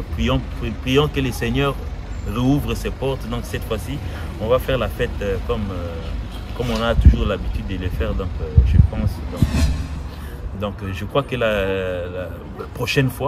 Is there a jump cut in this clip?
yes; 1 cut; at 10.0 s

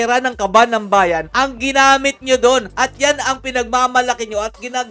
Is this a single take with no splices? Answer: yes; 0 cuts

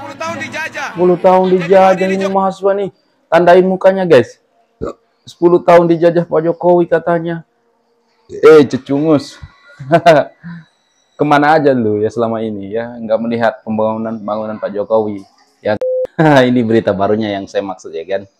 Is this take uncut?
no; 2 cuts; at 0.9 s, 15.8 s

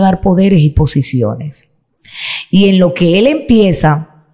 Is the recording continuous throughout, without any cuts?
yes; 0 cuts

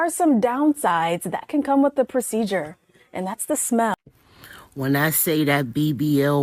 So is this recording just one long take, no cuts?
no; 1 cut; at 4.0 s

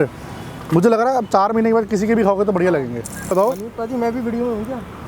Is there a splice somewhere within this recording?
yes; 1 cut; at 3.3 s

